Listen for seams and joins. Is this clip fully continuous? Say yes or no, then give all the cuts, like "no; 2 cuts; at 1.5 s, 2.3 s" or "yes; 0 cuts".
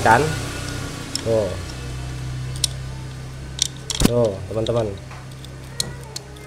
yes; 0 cuts